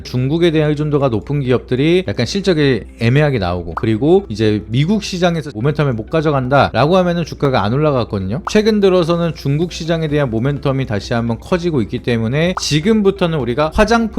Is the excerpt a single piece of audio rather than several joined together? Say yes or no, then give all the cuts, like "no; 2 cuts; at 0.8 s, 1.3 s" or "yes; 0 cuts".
no; 2 cuts; at 8.5 s, 12.6 s